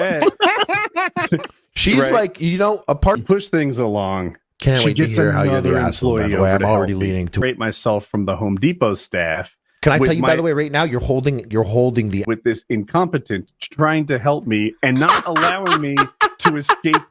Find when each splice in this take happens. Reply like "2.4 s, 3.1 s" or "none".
3.2 s, 7.4 s, 12.2 s